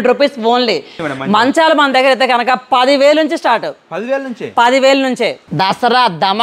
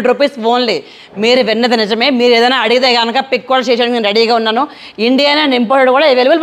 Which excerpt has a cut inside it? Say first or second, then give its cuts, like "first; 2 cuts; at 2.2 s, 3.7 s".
first; 2 cuts; at 1.0 s, 5.4 s